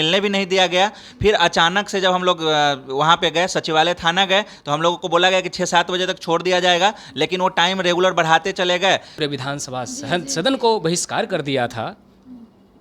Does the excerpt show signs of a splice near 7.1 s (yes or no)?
no